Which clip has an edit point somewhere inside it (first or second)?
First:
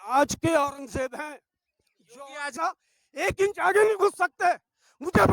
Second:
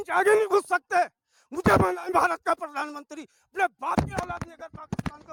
first